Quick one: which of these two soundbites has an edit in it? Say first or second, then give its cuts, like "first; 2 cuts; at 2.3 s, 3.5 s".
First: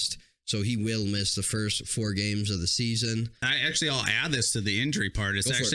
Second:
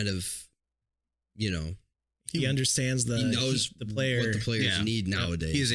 first; 1 cut; at 3.4 s